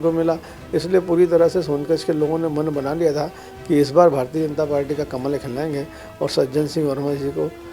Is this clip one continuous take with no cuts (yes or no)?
yes